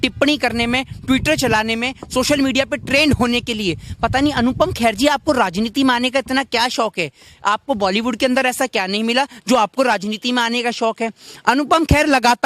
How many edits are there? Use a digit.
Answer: 0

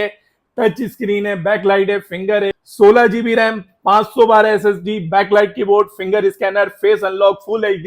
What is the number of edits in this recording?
1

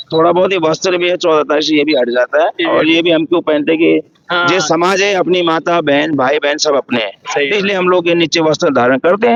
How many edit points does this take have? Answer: 0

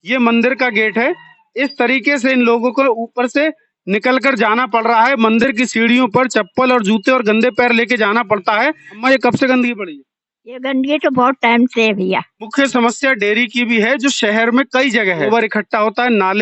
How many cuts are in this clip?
3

